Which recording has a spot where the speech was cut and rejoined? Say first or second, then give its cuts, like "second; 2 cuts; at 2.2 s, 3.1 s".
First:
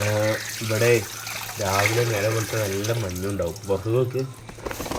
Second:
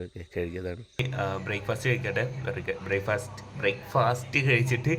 second; 1 cut; at 1.0 s